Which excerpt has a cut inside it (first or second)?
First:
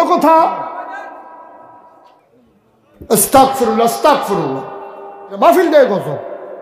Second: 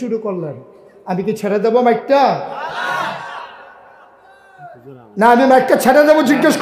first